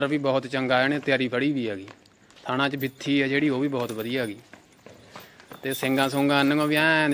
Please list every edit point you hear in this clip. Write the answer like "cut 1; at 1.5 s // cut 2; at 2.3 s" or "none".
none